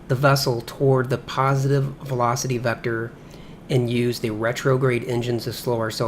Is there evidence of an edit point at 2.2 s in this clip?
yes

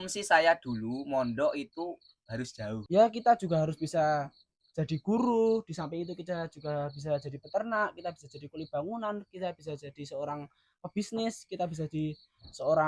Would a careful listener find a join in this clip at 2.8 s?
yes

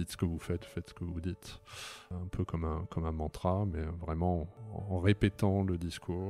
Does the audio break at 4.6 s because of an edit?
yes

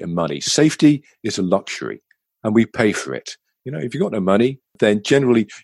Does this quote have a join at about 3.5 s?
no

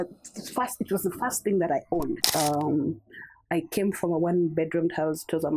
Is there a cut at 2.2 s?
yes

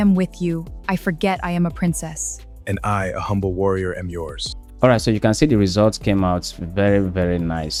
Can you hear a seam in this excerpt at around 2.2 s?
no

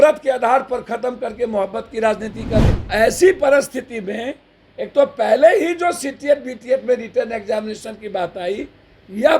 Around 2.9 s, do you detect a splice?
yes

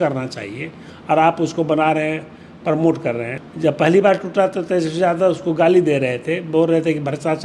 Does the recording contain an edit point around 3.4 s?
yes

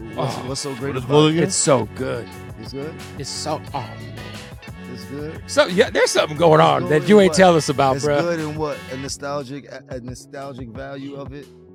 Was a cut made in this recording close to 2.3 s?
no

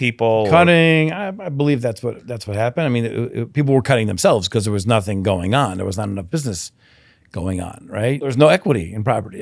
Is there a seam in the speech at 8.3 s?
yes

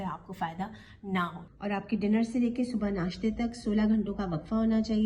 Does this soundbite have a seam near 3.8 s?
no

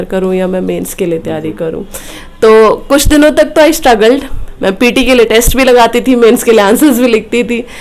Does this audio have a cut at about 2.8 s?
no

